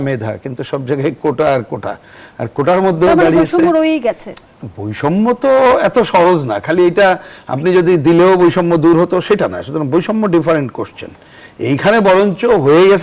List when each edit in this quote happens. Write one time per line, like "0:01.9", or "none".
none